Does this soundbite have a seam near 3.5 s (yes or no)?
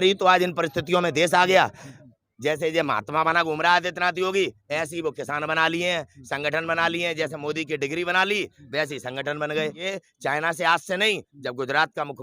no